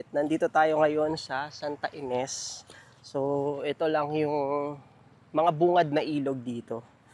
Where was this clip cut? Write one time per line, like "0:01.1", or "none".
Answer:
none